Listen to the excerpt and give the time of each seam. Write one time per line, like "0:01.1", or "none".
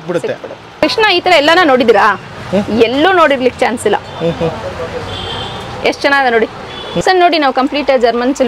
0:00.8
0:07.0